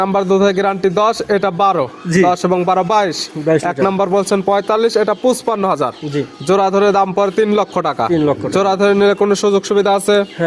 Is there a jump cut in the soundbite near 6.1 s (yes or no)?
no